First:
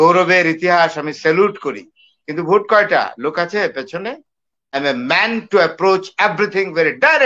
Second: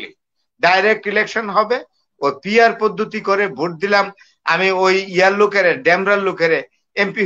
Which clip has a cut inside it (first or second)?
first